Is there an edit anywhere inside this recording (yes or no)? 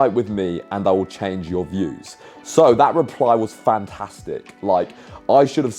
no